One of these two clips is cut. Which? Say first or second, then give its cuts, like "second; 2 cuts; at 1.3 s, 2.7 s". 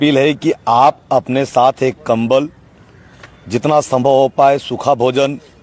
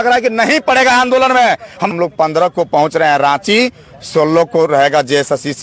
second; 1 cut; at 1.9 s